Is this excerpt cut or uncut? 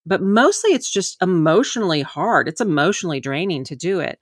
cut